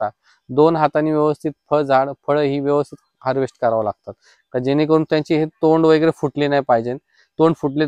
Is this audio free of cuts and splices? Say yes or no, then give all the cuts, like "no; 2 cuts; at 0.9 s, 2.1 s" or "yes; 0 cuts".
yes; 0 cuts